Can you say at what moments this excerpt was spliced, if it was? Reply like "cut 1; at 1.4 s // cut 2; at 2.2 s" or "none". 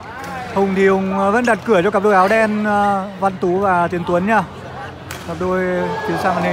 none